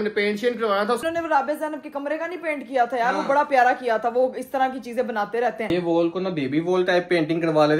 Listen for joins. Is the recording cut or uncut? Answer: cut